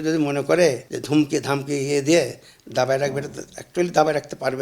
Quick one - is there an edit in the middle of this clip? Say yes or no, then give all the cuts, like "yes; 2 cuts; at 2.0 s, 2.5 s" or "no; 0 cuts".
yes; 1 cut; at 0.9 s